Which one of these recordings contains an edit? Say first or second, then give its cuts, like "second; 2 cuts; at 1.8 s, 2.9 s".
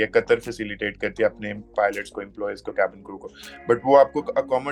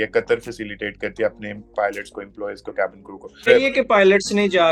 second; 1 cut; at 3.5 s